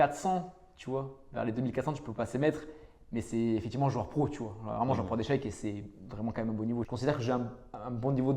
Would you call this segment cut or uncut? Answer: cut